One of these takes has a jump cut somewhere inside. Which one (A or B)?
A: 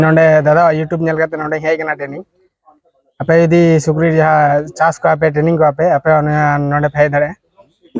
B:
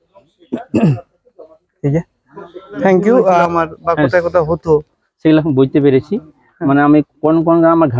B